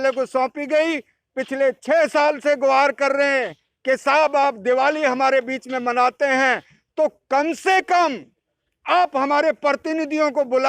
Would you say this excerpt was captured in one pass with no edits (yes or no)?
yes